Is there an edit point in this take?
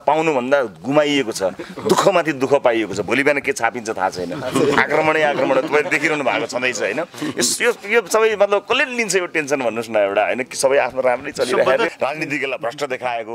yes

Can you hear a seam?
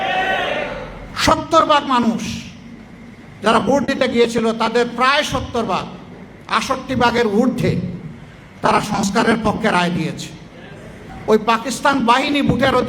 yes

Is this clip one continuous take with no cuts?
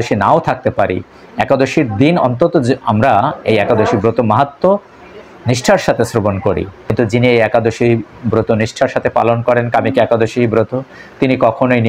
no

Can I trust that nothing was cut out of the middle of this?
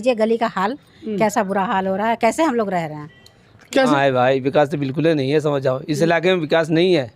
no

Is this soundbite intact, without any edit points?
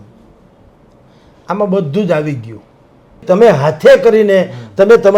no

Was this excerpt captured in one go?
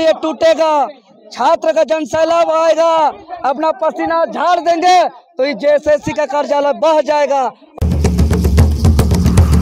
no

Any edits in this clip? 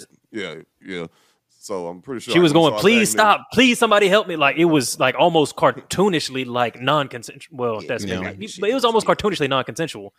no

